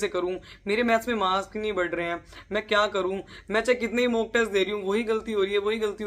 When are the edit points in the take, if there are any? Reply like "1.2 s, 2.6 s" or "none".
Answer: none